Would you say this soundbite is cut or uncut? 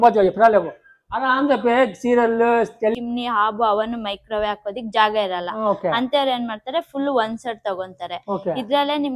cut